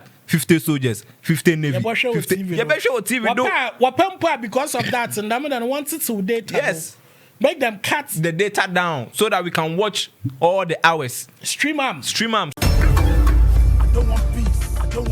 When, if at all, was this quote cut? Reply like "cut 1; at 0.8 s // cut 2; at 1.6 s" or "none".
cut 1; at 12.5 s